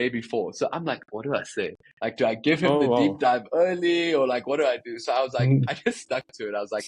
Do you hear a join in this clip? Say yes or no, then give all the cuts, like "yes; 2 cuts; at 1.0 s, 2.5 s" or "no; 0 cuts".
no; 0 cuts